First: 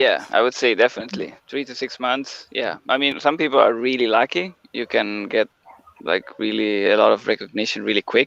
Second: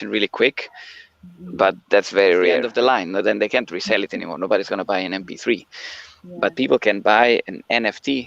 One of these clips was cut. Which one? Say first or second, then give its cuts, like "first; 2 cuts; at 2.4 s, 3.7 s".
second; 1 cut; at 2.7 s